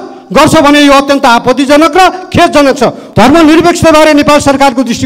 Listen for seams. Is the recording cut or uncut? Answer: cut